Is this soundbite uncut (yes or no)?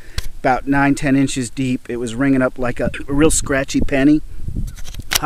no